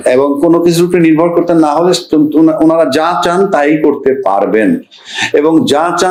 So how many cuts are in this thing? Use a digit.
0